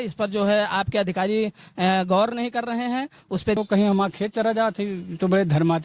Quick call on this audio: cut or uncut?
cut